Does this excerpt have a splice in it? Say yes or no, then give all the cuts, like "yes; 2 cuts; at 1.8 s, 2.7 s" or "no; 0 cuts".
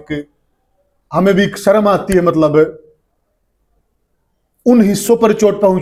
no; 0 cuts